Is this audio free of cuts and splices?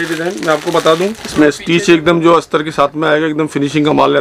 no; 1 cut; at 1.2 s

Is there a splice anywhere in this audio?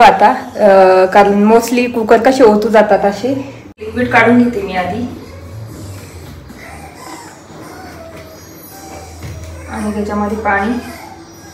yes; 1 cut; at 3.8 s

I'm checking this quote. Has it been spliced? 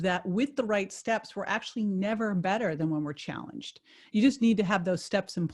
no; 0 cuts

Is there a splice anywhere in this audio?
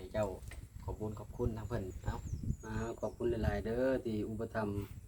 yes; 1 cut; at 1.9 s

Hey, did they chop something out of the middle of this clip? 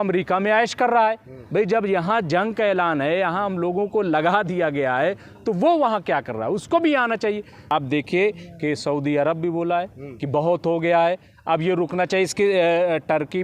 yes; 1 cut; at 7.7 s

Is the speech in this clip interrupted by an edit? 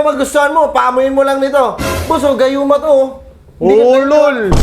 no; 0 cuts

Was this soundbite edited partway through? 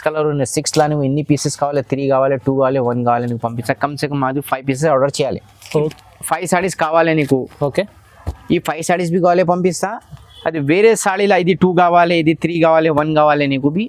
yes; 1 cut; at 5.9 s

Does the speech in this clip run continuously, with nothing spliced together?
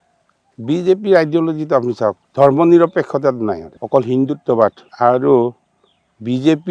no; 3 cuts; at 2.2 s, 3.7 s, 4.8 s

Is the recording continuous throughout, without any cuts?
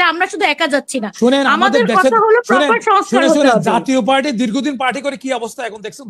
yes; 0 cuts

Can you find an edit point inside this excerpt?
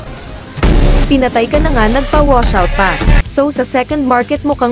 yes; 1 cut; at 3.2 s

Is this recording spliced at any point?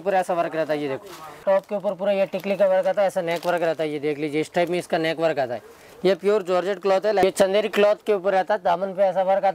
yes; 2 cuts; at 1.4 s, 7.2 s

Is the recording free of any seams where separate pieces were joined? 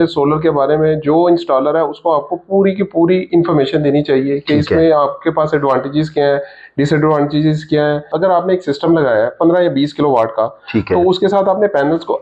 no; 1 cut; at 8.1 s

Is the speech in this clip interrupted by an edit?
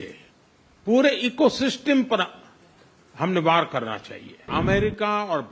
yes; 1 cut; at 4.4 s

